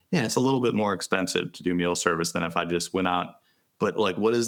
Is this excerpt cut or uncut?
uncut